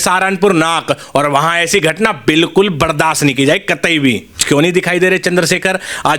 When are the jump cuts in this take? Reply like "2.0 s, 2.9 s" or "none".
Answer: 4.4 s

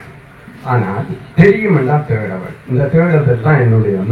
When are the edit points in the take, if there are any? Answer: none

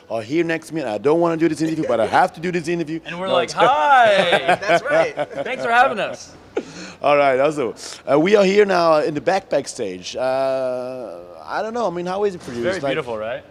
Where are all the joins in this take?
none

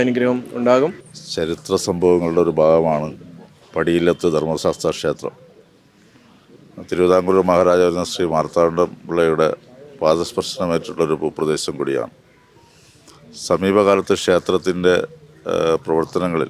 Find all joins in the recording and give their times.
none

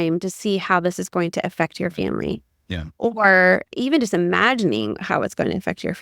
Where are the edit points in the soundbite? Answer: 3.7 s

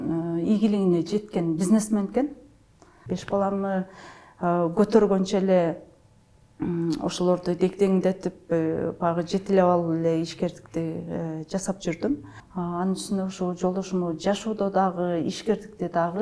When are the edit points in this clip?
2.9 s, 12.4 s

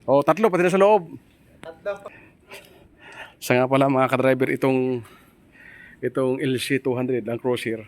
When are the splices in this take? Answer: 2.1 s

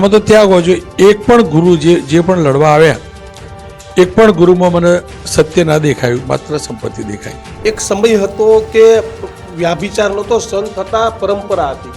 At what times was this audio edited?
7.6 s

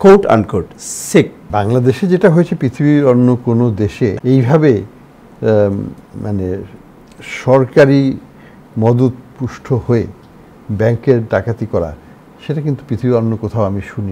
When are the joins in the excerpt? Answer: 1.4 s, 4.2 s

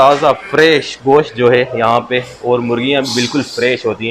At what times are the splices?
none

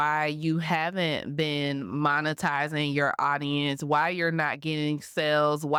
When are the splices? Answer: none

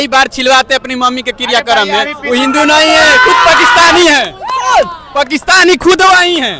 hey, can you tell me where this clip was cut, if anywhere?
none

